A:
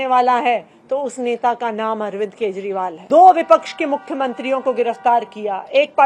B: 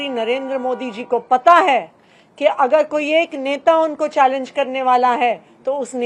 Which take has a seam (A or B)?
A